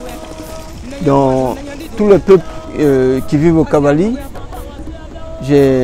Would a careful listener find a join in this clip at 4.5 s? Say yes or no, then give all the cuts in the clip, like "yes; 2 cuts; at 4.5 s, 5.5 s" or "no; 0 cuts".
no; 1 cut; at 2.7 s